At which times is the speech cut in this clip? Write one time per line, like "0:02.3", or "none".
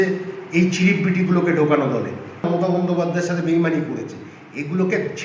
0:02.4